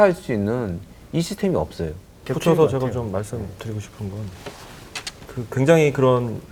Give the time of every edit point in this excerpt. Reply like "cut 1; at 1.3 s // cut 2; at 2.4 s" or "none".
none